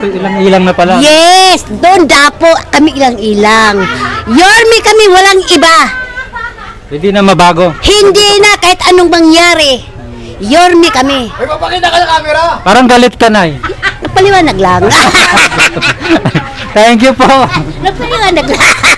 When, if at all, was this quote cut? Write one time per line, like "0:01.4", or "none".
none